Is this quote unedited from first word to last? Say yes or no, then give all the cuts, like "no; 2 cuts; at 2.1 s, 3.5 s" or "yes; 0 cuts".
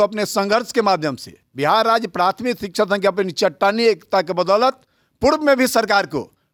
yes; 0 cuts